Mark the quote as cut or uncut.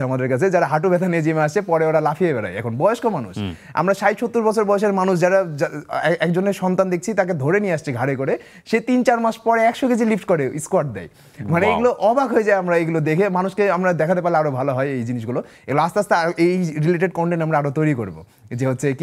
uncut